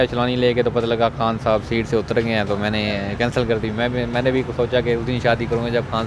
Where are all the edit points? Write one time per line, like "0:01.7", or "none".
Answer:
none